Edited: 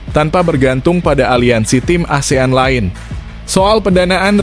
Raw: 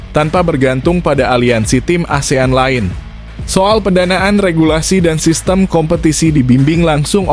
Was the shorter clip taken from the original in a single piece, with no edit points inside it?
yes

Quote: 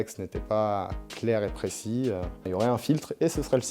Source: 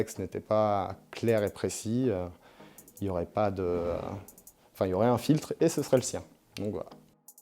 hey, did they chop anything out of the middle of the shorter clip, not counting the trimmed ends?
yes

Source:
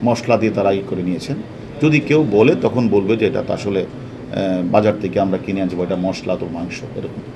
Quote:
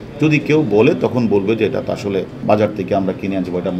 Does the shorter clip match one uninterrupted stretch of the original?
no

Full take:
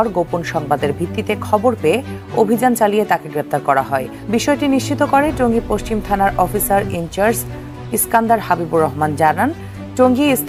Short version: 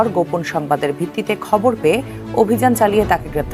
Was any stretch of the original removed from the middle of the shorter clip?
no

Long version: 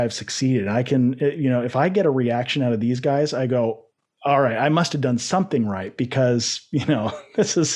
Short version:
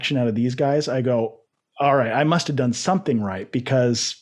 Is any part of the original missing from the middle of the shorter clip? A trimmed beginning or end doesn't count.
no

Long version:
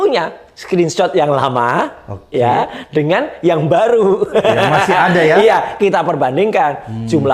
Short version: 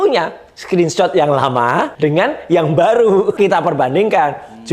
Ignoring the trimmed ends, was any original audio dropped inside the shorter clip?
yes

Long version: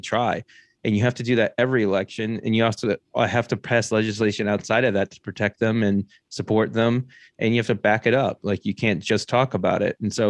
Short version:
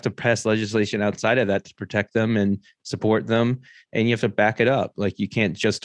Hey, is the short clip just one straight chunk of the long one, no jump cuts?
yes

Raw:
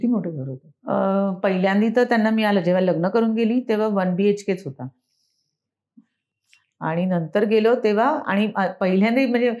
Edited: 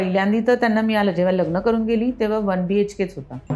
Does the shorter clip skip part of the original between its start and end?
no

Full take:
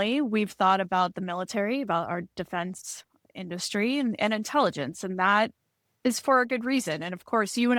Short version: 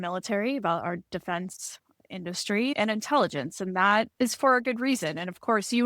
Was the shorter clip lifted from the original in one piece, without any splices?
no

